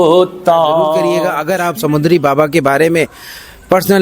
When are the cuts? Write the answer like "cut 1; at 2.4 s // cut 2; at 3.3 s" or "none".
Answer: cut 1; at 1.1 s